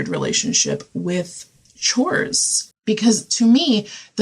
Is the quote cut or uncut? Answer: cut